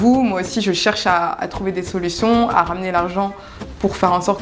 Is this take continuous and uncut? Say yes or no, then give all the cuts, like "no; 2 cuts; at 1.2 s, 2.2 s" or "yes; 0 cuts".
yes; 0 cuts